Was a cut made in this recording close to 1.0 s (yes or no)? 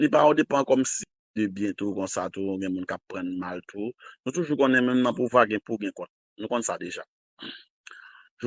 yes